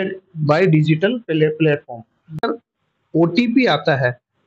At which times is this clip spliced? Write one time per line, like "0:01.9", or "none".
0:02.5

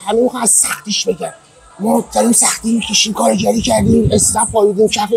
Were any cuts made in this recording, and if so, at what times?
none

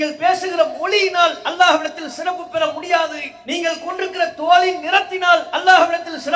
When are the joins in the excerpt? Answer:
0:03.3

